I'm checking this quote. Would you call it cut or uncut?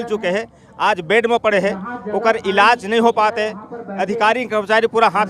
uncut